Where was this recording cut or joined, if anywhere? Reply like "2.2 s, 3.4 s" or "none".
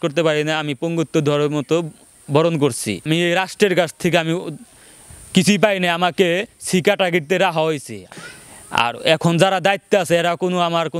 3.0 s, 8.0 s